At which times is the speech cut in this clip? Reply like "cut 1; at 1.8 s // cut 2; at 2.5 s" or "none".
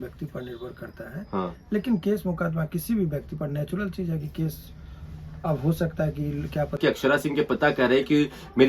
cut 1; at 6.8 s